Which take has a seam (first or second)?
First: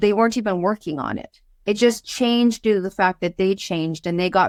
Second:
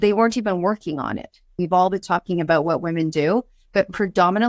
second